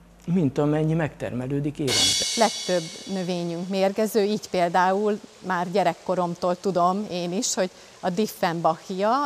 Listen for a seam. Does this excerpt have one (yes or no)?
yes